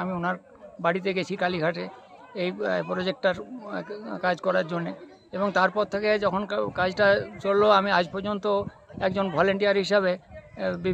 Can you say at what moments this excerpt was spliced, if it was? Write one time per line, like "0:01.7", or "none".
none